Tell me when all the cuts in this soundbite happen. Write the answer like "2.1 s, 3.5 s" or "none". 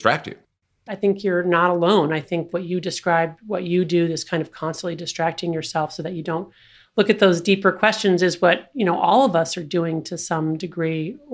1.0 s, 2.5 s